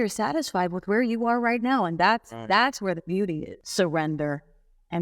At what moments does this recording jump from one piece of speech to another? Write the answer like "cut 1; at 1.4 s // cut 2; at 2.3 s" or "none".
cut 1; at 3.5 s